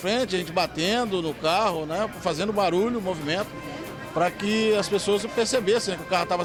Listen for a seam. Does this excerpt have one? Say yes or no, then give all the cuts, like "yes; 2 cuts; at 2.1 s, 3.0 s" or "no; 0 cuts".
no; 0 cuts